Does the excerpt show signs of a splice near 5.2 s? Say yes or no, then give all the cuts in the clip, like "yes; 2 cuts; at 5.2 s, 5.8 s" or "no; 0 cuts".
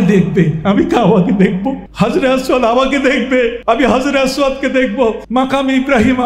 yes; 3 cuts; at 1.8 s, 3.6 s, 5.2 s